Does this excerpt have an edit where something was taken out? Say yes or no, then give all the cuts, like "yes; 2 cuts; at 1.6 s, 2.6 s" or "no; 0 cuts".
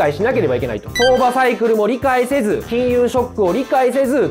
yes; 1 cut; at 0.9 s